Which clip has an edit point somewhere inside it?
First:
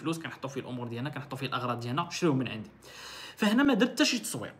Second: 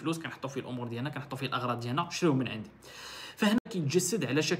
second; 1 cut; at 3.6 s

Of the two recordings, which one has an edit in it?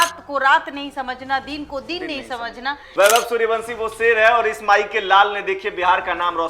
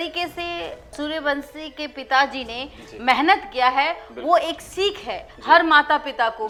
first; 1 cut; at 2.8 s

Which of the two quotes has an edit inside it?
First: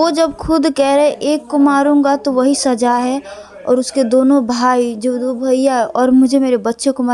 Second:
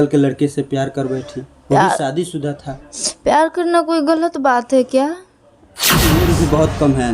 second; 1 cut; at 6.1 s

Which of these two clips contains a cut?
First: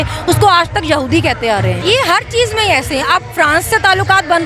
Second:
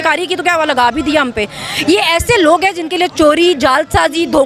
first; 1 cut; at 1.8 s

